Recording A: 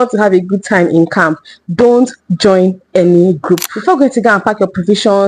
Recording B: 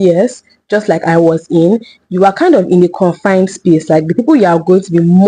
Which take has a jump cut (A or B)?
A